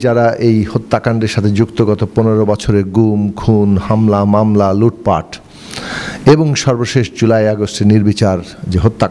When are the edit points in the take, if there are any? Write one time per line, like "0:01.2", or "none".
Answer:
none